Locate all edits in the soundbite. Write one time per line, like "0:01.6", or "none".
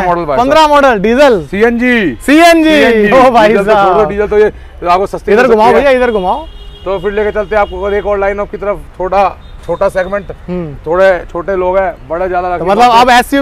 none

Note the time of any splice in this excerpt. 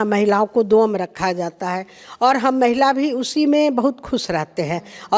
none

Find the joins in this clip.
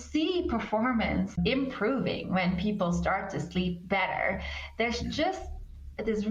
0:01.4

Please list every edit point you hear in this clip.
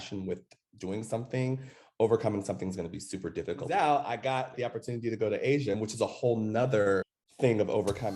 0:03.7
0:05.8
0:07.2

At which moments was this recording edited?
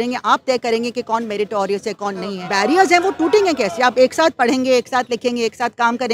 0:02.4

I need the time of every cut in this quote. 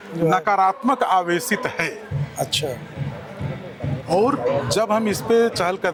none

